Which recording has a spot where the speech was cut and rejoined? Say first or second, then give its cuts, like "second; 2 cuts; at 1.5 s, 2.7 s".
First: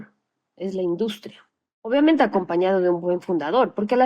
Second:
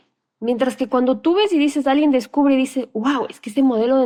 first; 1 cut; at 1.9 s